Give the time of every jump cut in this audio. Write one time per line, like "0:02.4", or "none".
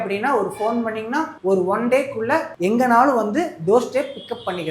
0:01.3
0:02.5